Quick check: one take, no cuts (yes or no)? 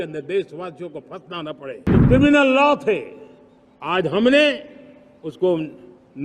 no